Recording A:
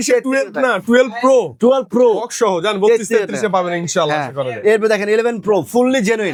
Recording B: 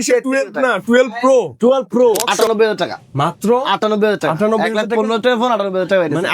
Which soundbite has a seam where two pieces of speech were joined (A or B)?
B